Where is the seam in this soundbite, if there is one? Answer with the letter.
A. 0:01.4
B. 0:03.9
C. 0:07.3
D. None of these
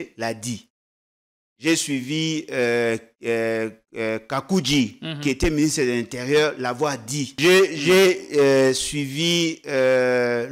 C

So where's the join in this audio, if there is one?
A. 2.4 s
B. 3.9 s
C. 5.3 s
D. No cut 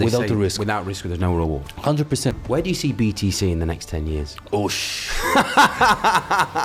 A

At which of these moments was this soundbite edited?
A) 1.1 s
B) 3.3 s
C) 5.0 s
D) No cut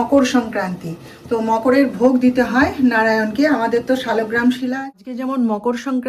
C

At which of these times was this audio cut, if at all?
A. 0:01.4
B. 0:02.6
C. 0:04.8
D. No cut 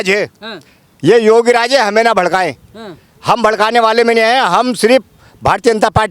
D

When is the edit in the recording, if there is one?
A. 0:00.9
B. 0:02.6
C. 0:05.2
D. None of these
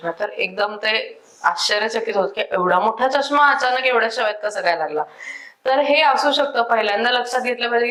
D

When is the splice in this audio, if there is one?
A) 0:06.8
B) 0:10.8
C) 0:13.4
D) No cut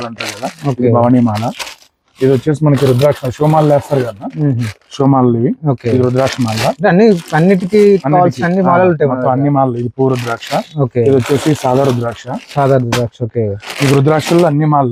D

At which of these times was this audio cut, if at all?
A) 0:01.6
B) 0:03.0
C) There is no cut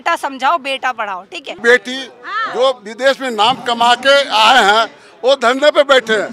A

